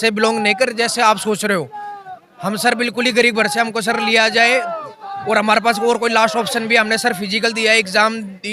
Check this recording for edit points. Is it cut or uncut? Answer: uncut